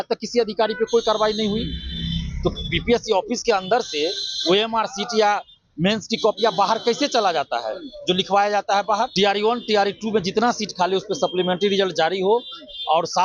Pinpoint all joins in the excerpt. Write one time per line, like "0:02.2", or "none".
0:09.1